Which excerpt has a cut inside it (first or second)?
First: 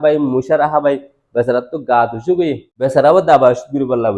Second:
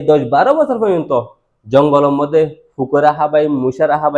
first